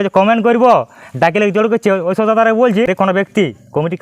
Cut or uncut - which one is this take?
cut